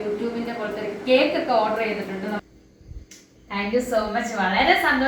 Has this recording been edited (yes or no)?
yes